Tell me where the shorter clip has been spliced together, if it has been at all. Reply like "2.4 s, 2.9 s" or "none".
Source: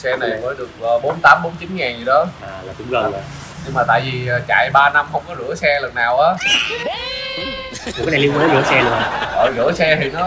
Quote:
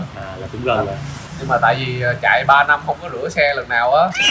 none